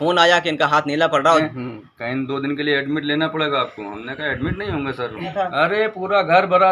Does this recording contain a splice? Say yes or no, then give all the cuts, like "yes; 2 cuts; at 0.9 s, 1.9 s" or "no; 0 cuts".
yes; 2 cuts; at 1.4 s, 5.3 s